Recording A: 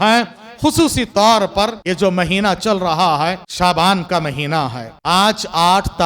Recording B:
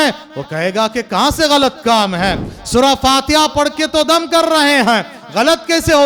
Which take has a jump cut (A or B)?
A